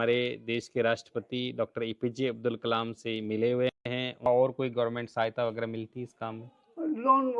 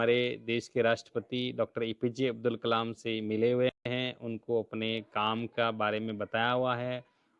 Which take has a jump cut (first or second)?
first